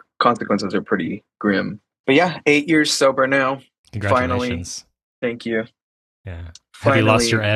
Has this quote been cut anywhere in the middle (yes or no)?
yes